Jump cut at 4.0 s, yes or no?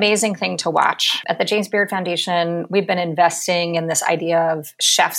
no